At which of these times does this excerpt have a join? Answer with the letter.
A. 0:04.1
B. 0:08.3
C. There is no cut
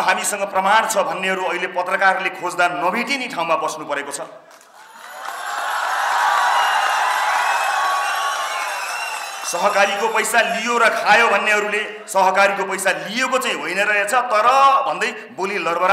C